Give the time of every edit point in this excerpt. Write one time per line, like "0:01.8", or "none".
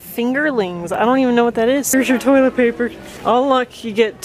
0:01.9
0:03.1